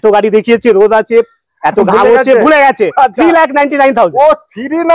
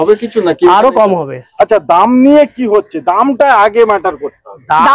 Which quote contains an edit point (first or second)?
second